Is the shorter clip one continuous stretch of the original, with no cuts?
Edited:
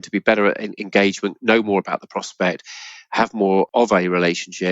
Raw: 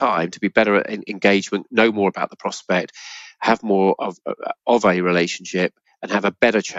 no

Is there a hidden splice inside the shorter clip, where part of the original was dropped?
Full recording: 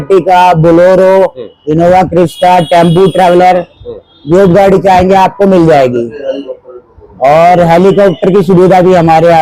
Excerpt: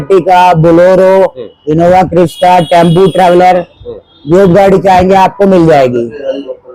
no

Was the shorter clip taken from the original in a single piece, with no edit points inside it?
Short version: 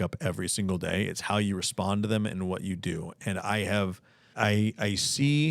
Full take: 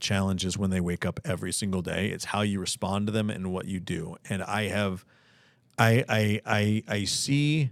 no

